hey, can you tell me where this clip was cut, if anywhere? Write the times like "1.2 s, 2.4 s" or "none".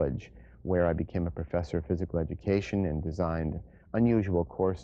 3.2 s